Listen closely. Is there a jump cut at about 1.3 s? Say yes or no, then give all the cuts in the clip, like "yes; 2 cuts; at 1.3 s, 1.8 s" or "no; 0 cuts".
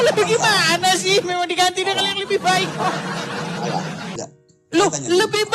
no; 1 cut; at 4.2 s